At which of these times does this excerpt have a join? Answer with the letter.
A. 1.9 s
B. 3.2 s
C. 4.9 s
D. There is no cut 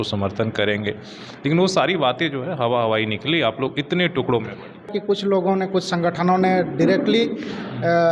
C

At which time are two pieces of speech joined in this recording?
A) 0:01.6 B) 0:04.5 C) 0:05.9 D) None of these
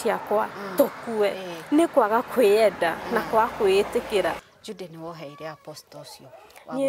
B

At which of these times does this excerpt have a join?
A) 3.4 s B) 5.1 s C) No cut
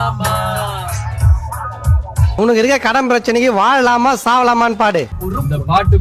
B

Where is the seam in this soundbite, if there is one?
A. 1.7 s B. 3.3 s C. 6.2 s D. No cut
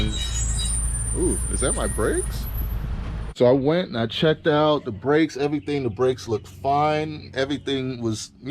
B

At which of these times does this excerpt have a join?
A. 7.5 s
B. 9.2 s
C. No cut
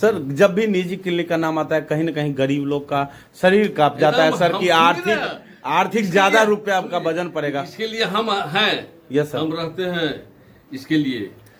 C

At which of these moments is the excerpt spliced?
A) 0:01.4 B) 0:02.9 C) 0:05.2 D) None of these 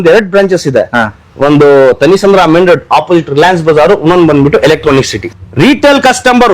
C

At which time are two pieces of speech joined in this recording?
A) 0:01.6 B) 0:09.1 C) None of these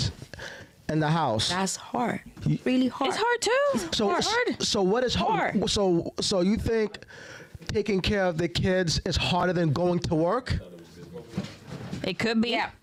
C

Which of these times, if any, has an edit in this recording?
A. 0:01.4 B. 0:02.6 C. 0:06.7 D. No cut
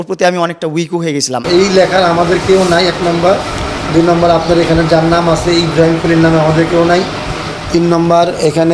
A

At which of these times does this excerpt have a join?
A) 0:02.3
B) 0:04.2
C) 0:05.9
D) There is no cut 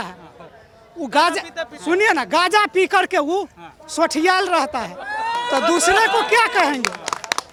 D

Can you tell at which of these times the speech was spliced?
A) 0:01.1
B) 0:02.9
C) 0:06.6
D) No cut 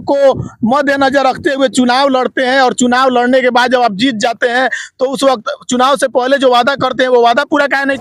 D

